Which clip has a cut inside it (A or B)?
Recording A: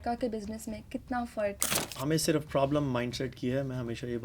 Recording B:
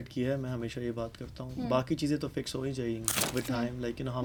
A